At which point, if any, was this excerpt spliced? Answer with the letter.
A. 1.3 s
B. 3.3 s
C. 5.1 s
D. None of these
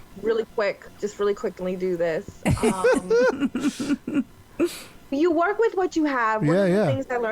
C